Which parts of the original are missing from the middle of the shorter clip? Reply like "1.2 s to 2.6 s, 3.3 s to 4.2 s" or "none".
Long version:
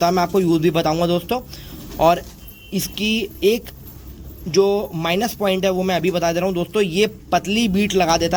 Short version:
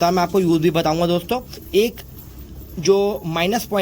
1.6 s to 3.3 s